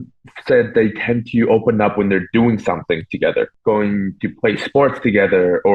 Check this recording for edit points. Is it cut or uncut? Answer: cut